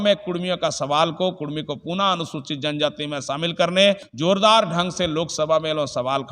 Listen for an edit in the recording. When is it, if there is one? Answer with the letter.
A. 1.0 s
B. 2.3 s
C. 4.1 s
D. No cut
C